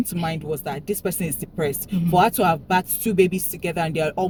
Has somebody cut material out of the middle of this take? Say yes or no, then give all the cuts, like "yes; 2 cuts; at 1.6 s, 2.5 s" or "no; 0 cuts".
no; 0 cuts